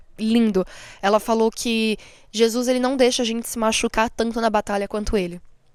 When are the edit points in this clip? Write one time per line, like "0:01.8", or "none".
none